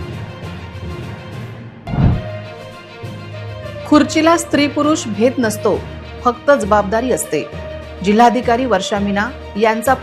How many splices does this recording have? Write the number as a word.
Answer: one